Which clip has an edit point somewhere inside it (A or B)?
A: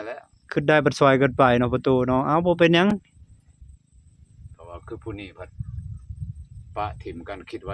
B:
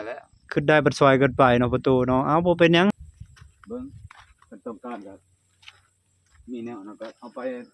B